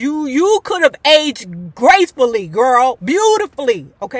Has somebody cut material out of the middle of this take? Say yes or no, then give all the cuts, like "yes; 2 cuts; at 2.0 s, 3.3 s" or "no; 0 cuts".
no; 0 cuts